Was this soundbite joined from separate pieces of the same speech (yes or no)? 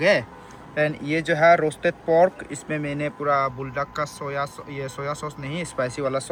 no